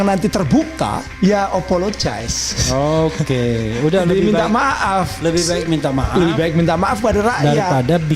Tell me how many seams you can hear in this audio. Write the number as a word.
one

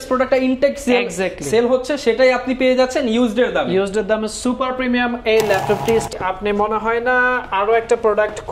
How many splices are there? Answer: one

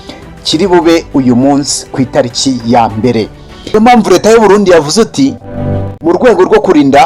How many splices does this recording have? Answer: one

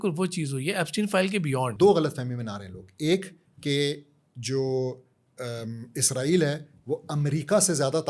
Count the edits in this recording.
one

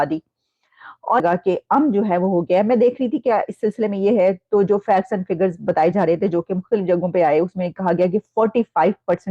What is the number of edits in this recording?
one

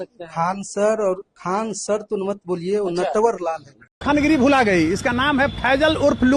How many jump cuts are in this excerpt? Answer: one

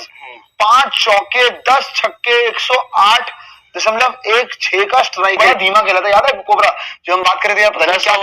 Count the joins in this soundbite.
one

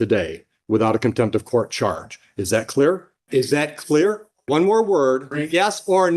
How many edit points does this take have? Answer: three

